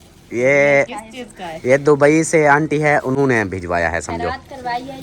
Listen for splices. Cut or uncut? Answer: uncut